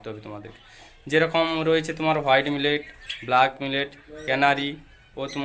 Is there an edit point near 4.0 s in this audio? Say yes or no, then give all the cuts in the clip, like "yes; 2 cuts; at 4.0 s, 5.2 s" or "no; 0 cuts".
no; 0 cuts